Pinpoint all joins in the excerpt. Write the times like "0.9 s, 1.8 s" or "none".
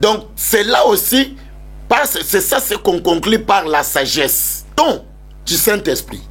4.5 s